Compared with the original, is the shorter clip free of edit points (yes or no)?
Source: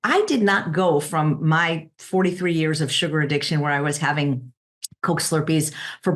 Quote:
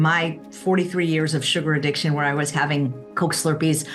no